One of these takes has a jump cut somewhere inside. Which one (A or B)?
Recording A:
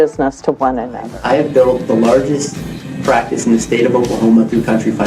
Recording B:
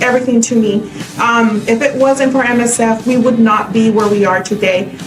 A